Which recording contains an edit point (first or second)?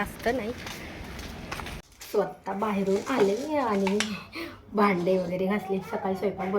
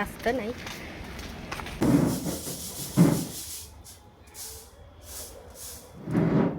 second